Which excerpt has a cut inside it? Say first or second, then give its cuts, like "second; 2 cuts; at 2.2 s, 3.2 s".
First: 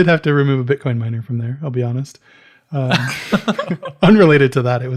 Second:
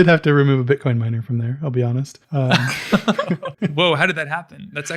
second; 2 cuts; at 2.2 s, 3.5 s